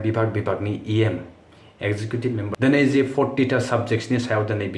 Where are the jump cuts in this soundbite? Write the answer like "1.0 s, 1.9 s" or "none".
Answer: 2.5 s